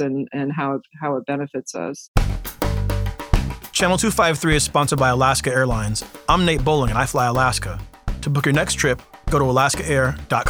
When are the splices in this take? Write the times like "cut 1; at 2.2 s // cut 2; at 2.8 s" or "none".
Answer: cut 1; at 2.1 s